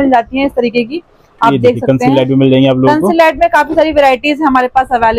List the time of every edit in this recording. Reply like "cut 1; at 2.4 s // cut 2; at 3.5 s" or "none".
none